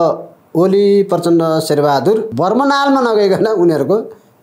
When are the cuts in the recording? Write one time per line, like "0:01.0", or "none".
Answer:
0:02.3